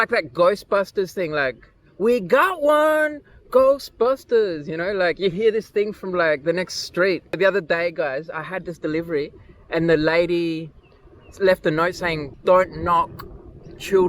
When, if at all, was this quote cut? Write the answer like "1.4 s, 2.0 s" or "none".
7.4 s, 12.3 s